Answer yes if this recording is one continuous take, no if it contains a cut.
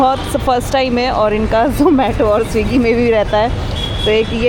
yes